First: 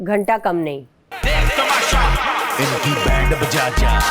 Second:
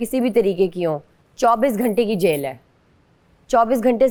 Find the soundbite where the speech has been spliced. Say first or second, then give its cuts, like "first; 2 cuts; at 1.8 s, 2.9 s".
first; 1 cut; at 1.1 s